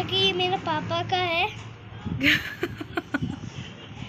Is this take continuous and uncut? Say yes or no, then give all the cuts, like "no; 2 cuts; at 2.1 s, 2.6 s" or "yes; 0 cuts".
yes; 0 cuts